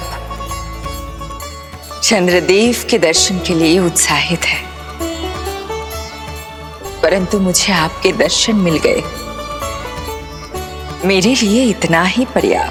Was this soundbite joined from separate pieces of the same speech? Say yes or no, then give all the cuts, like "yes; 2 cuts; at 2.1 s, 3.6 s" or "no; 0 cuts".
no; 0 cuts